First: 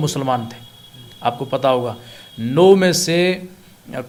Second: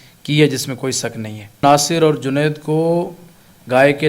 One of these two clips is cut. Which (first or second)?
second